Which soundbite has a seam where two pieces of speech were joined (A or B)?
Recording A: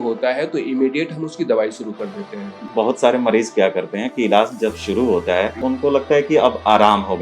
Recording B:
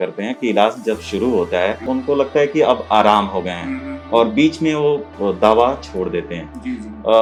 A